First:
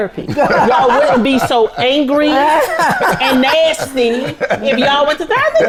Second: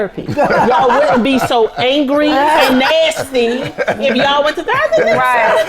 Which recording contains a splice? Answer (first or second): second